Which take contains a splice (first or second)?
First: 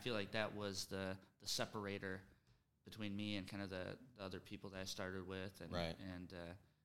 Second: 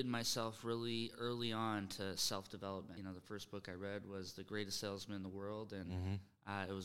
second